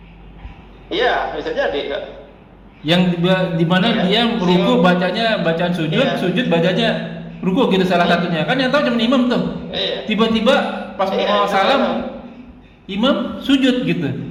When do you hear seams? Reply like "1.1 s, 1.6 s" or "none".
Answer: none